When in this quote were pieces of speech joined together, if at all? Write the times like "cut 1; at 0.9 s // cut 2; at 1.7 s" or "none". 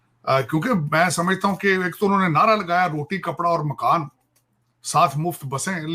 none